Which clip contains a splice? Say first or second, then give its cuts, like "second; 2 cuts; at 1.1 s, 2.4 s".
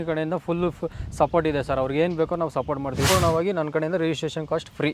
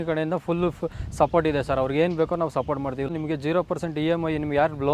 first; 1 cut; at 3.1 s